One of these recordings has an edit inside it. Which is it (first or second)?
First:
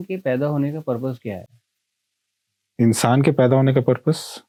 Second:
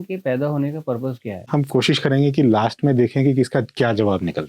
second